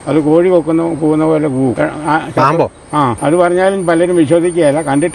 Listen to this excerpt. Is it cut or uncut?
cut